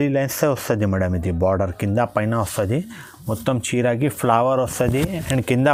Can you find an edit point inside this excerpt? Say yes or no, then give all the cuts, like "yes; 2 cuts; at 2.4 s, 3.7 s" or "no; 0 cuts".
no; 0 cuts